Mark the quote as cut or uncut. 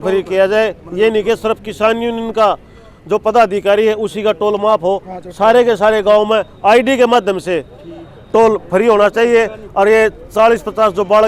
uncut